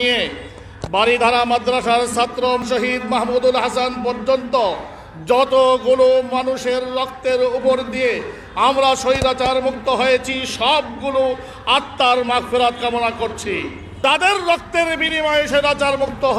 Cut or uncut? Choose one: cut